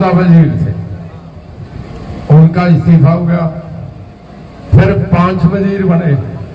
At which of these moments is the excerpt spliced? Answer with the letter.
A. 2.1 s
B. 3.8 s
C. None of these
C